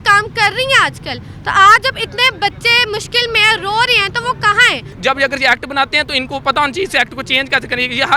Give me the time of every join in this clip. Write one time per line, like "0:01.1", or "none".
0:04.9